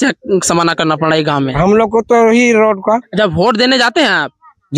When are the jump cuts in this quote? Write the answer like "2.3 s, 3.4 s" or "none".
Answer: 3.1 s